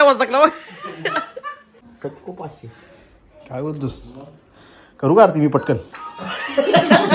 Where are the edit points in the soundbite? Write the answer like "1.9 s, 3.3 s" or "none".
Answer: 1.8 s